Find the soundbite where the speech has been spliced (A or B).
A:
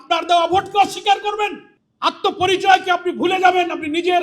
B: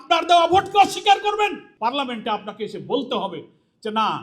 B